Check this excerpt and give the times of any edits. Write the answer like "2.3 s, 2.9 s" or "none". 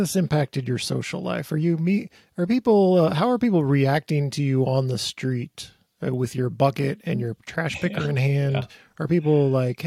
none